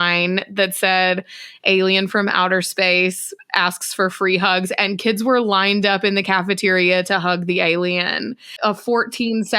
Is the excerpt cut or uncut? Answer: cut